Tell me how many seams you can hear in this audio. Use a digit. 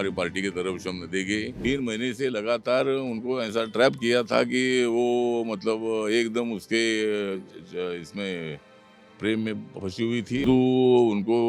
2